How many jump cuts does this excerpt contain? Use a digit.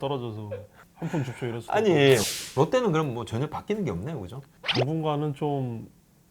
1